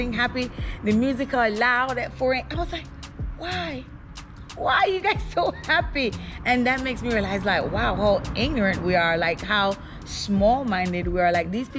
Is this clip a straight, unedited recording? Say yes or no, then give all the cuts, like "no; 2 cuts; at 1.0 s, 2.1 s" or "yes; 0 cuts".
yes; 0 cuts